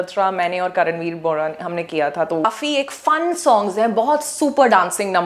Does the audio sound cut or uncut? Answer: cut